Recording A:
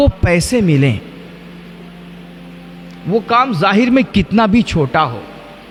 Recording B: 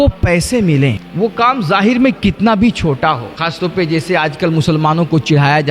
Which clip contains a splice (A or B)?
B